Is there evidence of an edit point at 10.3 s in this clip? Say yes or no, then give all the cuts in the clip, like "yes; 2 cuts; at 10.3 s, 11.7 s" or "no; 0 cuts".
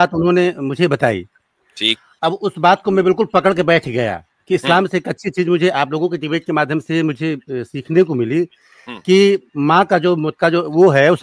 yes; 2 cuts; at 2.1 s, 10.3 s